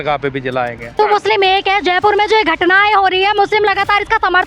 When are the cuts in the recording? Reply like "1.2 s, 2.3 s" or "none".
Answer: 1.0 s